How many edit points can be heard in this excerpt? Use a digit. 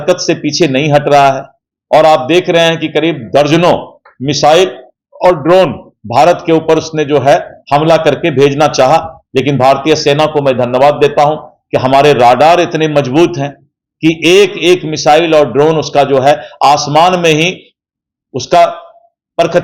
0